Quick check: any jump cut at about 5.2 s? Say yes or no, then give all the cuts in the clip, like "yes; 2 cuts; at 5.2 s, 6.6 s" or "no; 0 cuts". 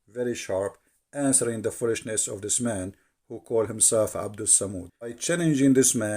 yes; 1 cut; at 5.2 s